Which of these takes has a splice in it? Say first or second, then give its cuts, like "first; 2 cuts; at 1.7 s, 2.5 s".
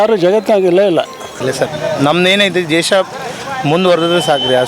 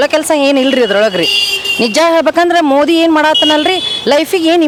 first; 1 cut; at 1.3 s